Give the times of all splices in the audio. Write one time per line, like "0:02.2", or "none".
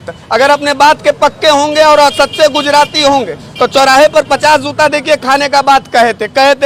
none